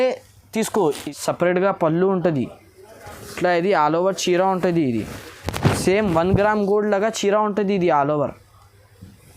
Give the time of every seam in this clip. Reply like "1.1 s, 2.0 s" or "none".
1.0 s

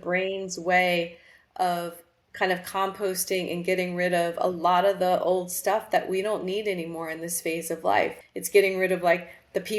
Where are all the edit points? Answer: 8.1 s

